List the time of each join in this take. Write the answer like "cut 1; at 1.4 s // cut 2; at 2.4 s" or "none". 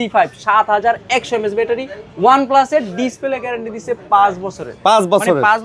none